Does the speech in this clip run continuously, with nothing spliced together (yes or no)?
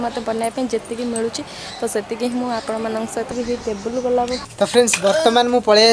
no